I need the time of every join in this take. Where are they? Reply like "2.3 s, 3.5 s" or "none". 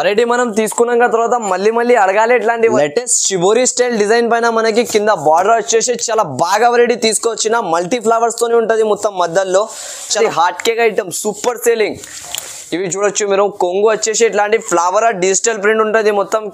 2.8 s, 10.2 s